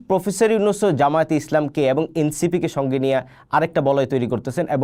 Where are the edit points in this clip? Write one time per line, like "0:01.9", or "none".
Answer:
none